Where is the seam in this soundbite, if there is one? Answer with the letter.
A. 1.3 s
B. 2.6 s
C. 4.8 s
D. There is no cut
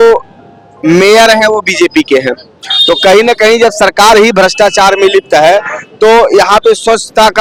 D